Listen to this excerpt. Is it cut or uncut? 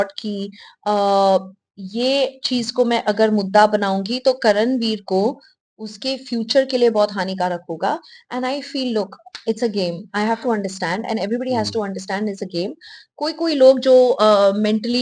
uncut